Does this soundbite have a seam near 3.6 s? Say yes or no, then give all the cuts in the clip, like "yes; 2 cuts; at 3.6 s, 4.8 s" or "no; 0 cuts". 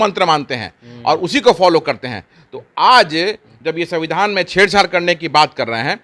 no; 0 cuts